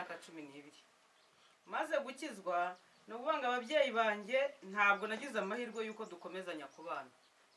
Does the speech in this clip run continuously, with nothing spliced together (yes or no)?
yes